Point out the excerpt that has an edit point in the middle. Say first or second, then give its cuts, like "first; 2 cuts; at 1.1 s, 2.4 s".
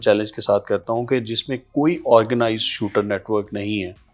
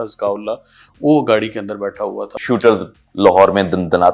second; 1 cut; at 2.4 s